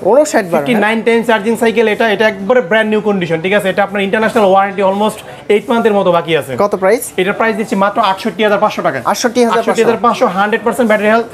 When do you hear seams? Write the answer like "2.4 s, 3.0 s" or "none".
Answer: none